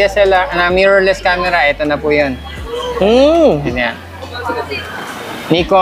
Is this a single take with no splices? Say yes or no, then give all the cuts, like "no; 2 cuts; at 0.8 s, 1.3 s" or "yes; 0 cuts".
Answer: yes; 0 cuts